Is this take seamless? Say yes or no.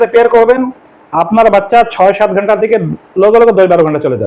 yes